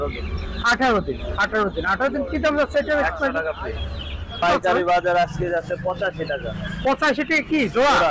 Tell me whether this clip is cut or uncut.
cut